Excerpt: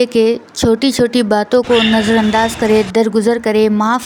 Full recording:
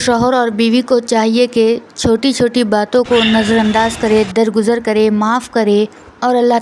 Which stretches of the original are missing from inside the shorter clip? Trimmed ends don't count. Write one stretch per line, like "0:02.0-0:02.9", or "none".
none

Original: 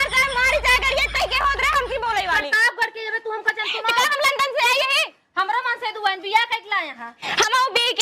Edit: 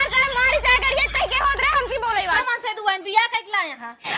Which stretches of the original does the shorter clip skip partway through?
0:02.4-0:05.6

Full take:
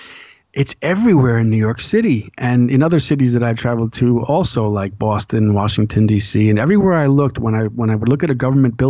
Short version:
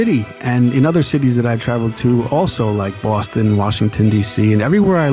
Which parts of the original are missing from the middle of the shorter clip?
none

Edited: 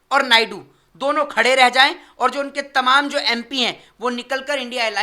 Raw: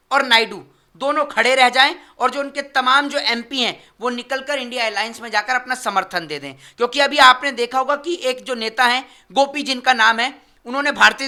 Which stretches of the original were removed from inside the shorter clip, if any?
none

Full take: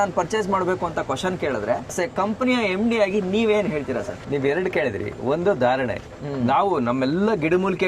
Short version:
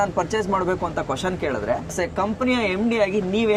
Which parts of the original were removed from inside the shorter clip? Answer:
none

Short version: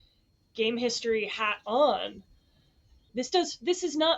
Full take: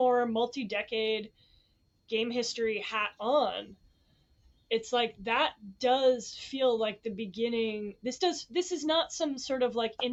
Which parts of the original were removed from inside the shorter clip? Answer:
0:04.6-0:07.9

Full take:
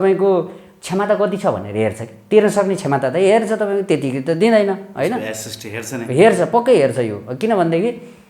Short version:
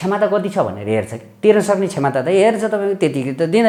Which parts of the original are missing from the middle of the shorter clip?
none

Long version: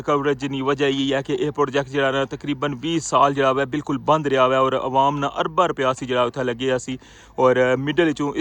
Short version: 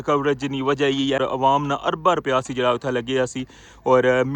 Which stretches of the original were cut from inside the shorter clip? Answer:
0:01.2-0:04.7

